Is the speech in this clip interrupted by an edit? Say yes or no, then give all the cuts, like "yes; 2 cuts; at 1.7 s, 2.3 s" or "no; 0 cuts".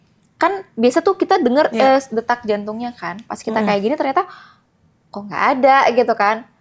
no; 0 cuts